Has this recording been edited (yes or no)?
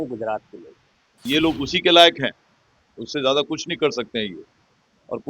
yes